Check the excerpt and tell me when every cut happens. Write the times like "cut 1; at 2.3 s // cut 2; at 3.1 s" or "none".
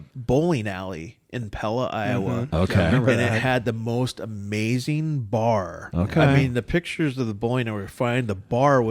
cut 1; at 5.8 s